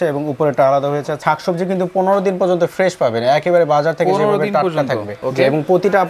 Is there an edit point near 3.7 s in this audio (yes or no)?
no